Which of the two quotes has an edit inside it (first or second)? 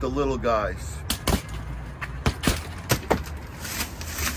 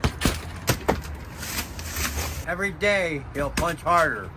first